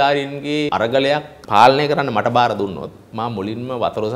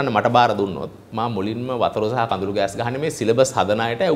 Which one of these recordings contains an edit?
first; 1 cut; at 1.0 s

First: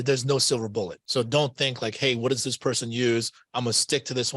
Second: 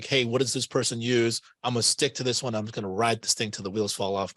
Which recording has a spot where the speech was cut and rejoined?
first; 1 cut; at 1.0 s

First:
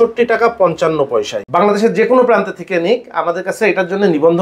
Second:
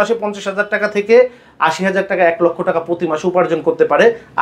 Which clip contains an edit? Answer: first; 1 cut; at 1.4 s

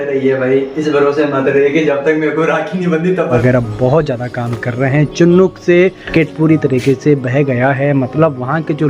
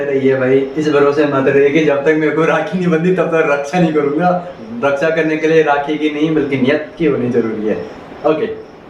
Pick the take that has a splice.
first; 2 cuts; at 3.4 s, 6.1 s

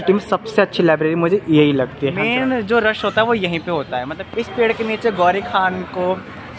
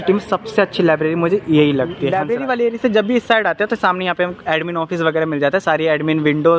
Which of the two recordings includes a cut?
first; 2 cuts; at 2.0 s, 4.2 s

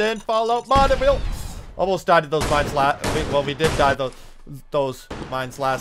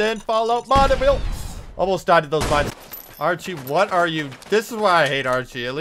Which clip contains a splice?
second; 1 cut; at 2.7 s

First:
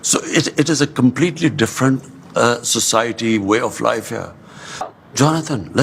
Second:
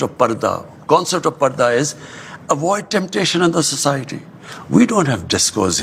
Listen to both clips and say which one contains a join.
first; 1 cut; at 4.9 s

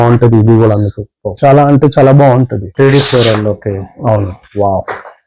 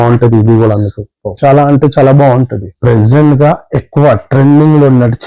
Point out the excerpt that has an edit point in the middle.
second; 1 cut; at 2.7 s

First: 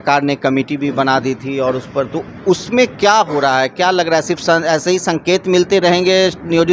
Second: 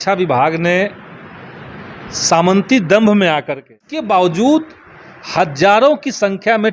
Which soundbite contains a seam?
second; 1 cut; at 3.9 s

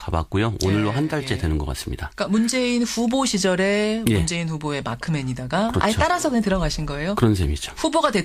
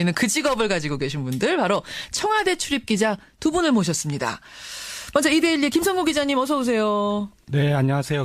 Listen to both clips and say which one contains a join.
first; 1 cut; at 5.6 s

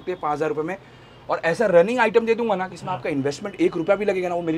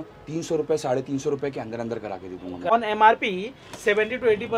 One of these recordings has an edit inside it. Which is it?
second; 1 cut; at 2.7 s

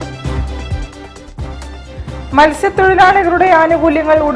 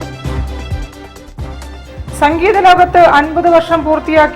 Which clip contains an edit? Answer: second; 1 cut; at 1.8 s

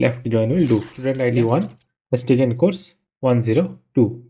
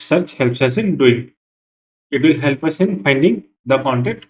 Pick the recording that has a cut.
first; 1 cut; at 1.0 s

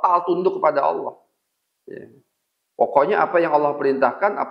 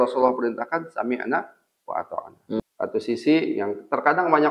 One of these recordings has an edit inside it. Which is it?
second; 1 cut; at 2.6 s

